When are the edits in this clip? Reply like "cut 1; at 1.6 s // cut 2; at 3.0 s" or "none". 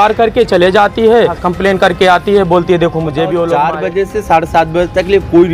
cut 1; at 1.4 s // cut 2; at 3.5 s